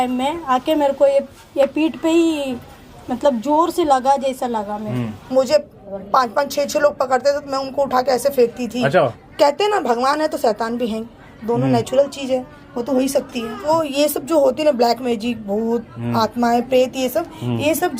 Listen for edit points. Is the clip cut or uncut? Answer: cut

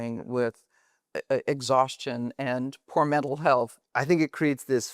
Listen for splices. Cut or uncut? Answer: cut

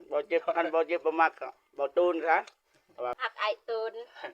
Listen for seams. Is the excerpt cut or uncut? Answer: cut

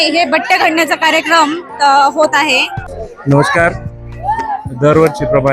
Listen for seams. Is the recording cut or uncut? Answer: cut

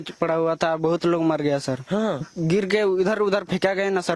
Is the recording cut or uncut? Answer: cut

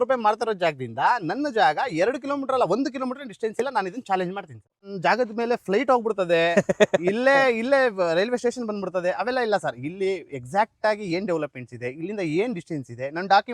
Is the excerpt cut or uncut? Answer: cut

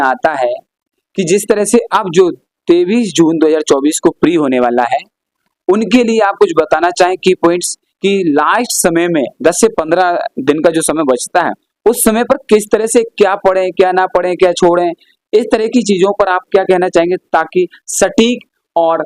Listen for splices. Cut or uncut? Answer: uncut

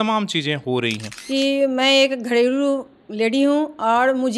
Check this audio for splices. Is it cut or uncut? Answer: cut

